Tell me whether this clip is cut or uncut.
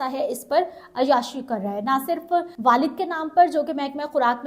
cut